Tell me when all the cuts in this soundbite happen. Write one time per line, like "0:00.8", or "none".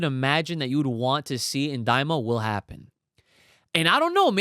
none